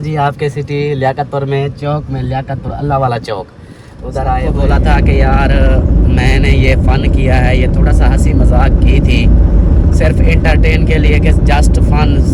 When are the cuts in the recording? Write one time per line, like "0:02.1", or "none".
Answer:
0:04.4